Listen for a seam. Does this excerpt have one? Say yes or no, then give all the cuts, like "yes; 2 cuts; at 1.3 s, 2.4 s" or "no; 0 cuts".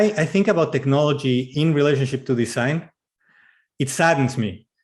yes; 1 cut; at 1.5 s